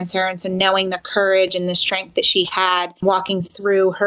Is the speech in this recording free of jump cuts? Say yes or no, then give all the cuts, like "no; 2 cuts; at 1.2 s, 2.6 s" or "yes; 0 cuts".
no; 1 cut; at 3.0 s